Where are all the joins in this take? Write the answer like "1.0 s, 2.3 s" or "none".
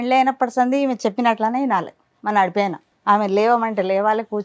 2.9 s